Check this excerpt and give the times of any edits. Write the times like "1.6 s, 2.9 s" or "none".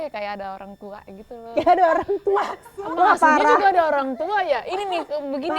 2.6 s